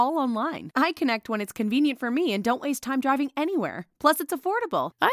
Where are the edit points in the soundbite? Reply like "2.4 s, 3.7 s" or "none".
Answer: none